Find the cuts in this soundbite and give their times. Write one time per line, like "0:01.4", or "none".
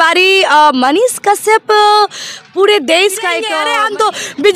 0:03.5